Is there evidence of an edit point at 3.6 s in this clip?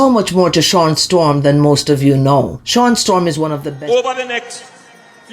yes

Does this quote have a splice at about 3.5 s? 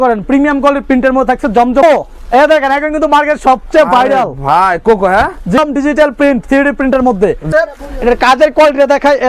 no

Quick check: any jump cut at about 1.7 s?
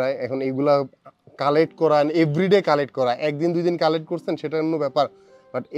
no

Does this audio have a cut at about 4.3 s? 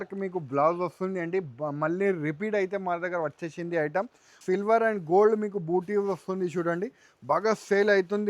yes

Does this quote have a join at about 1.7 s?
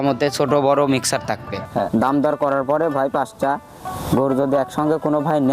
yes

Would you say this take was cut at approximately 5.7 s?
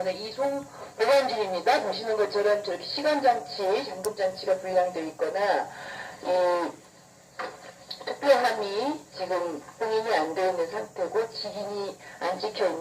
no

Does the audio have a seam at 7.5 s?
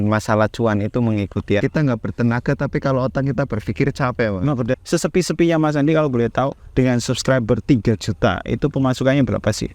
no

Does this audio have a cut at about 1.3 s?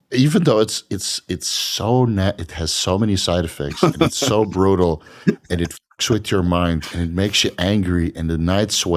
no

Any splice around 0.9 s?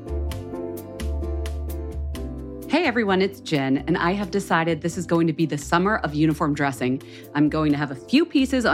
no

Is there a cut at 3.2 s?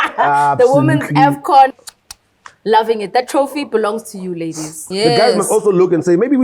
no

